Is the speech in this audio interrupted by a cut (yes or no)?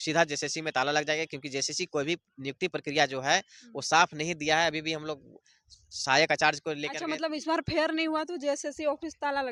no